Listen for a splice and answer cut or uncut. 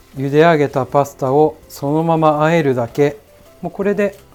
uncut